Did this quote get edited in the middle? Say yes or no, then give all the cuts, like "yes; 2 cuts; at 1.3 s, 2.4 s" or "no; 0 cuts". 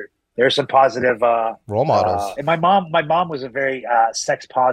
yes; 2 cuts; at 1.6 s, 2.3 s